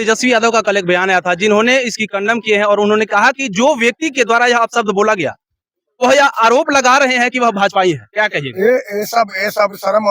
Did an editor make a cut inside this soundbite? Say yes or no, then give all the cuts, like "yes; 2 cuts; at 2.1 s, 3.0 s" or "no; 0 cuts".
no; 0 cuts